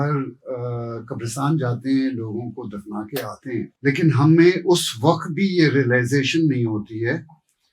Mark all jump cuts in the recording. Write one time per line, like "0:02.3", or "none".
0:03.7